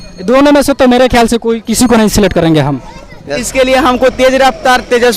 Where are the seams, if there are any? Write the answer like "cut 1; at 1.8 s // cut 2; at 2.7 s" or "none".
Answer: cut 1; at 3.4 s